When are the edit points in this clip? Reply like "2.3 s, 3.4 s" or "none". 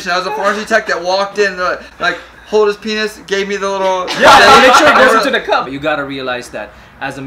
5.6 s